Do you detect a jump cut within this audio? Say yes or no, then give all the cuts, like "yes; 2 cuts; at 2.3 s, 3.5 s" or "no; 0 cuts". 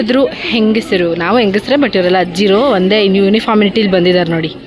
no; 0 cuts